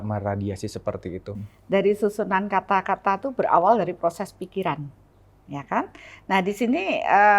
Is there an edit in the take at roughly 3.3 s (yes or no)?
no